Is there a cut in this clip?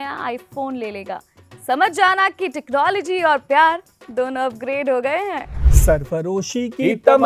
yes; 1 cut; at 5.7 s

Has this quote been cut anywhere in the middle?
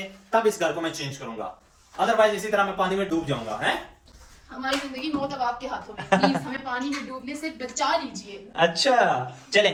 no; 0 cuts

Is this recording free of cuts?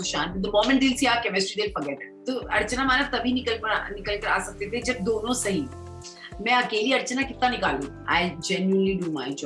no; 2 cuts; at 2.1 s, 8.0 s

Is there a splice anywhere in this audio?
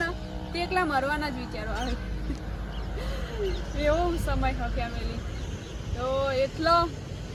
no; 0 cuts

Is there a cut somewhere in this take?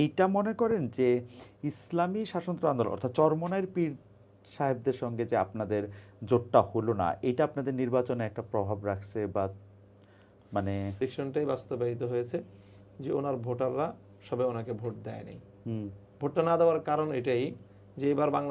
yes; 1 cut; at 11.0 s

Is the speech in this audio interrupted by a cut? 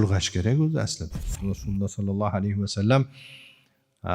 yes; 1 cut; at 1.4 s

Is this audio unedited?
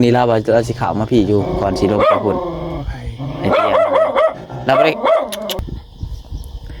no; 1 cut; at 5.7 s

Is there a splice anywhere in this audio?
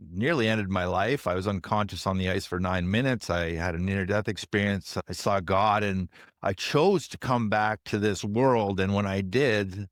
no; 0 cuts

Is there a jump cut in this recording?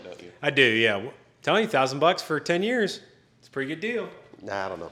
no; 0 cuts

